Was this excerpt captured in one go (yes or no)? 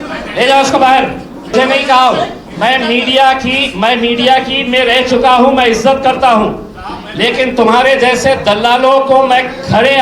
no